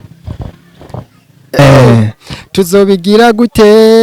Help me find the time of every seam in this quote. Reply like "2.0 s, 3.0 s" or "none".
1.6 s